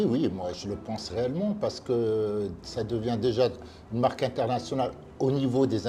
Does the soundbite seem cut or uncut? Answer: uncut